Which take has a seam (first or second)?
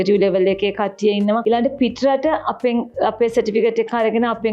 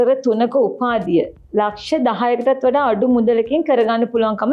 first